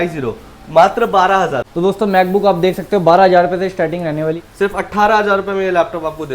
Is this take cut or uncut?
cut